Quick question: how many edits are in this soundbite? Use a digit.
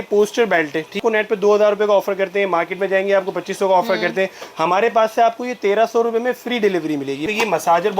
2